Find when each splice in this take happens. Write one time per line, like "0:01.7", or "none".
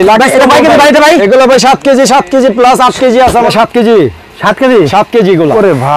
0:03.5